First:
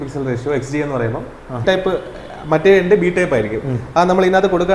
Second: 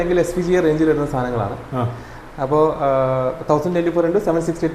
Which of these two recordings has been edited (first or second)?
first